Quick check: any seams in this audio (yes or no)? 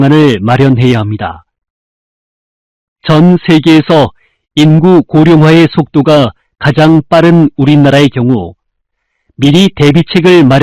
no